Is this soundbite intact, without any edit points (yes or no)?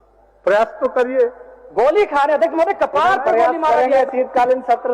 yes